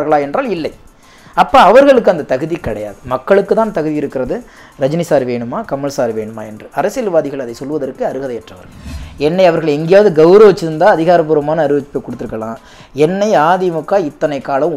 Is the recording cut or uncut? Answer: cut